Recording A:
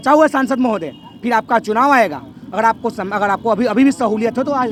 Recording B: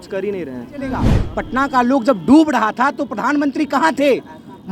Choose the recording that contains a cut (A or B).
B